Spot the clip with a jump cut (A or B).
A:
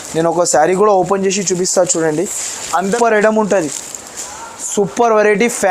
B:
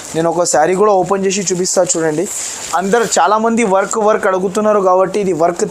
A